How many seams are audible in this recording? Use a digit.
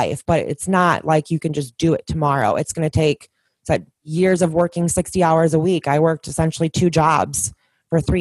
0